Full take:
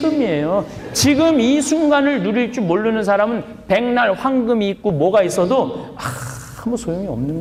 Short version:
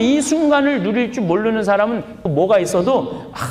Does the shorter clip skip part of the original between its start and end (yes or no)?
yes